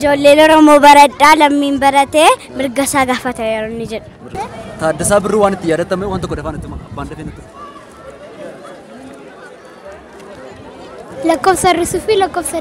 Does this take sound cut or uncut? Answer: cut